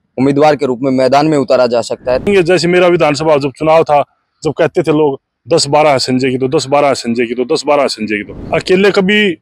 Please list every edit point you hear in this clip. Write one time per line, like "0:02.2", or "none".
0:02.3
0:08.5